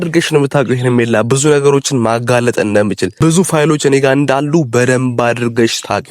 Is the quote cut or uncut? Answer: cut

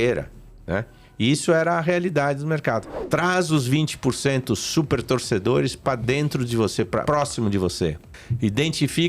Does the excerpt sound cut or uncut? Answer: cut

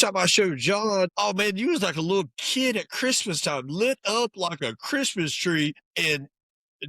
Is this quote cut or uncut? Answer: cut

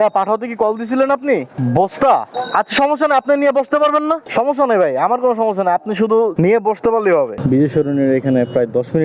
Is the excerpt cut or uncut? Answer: cut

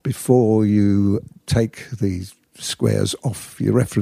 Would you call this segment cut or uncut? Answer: cut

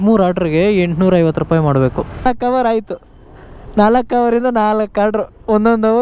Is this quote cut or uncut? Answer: cut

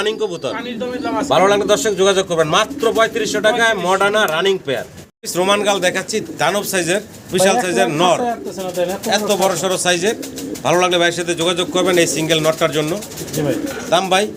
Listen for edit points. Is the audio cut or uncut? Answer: uncut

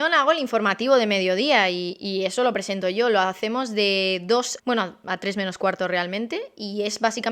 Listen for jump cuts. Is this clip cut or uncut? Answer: cut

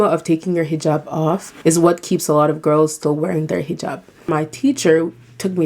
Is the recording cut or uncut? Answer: cut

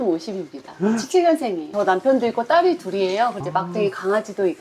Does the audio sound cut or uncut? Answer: cut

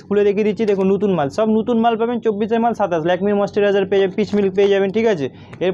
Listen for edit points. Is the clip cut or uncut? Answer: uncut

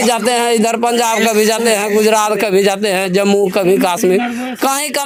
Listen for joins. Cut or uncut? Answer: uncut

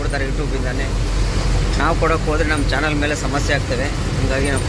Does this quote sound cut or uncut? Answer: uncut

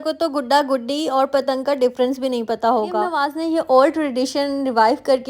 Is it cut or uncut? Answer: cut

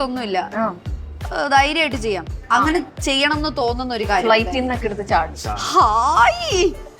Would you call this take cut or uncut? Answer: cut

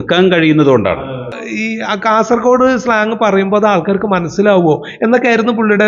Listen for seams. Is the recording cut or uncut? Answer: cut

